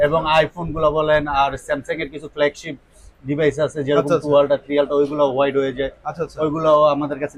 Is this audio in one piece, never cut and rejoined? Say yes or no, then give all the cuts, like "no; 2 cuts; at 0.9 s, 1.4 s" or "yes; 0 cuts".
yes; 0 cuts